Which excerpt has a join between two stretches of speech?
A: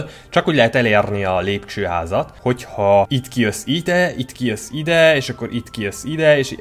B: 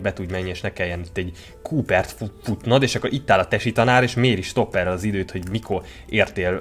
A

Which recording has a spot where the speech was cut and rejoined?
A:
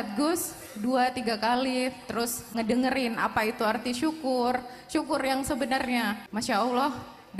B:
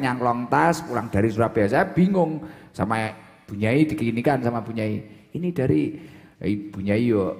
A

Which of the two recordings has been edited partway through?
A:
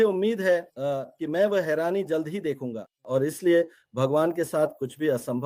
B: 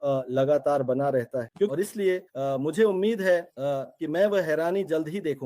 B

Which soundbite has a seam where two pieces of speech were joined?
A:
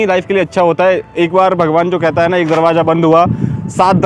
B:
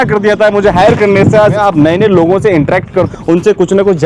B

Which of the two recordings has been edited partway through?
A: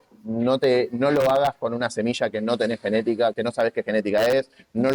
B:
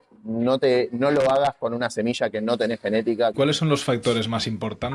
B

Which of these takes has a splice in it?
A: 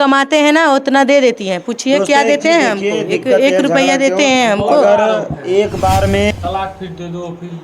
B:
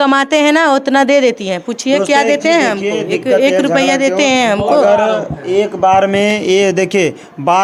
A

